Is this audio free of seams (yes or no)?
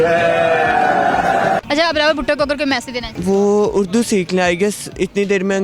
no